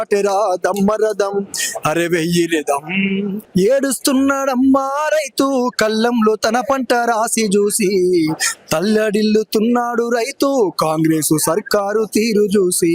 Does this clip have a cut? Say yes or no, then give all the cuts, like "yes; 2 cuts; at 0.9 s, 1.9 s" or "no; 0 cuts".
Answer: yes; 1 cut; at 3.4 s